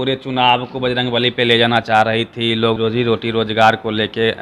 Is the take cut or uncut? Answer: cut